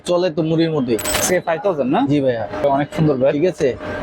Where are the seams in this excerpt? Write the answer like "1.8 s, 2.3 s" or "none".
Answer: 1.1 s, 2.6 s